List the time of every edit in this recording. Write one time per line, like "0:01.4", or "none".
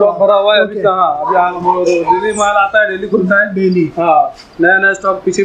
none